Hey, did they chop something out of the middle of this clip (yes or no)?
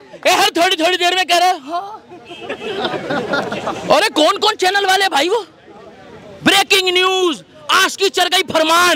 no